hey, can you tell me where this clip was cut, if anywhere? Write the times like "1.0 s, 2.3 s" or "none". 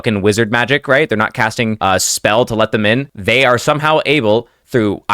1.8 s, 3.1 s